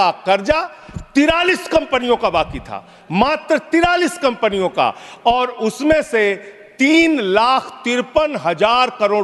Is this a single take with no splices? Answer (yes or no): yes